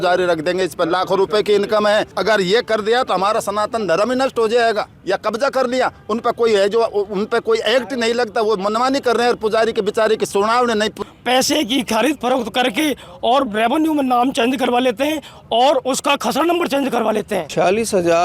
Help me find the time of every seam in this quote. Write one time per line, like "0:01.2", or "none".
0:02.1
0:04.9
0:11.0
0:17.5